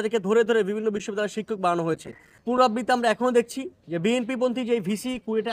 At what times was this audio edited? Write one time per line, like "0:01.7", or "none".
0:02.3